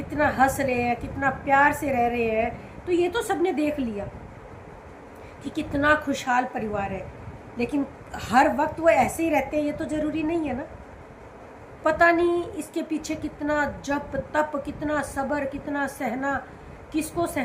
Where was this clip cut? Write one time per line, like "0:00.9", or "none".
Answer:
none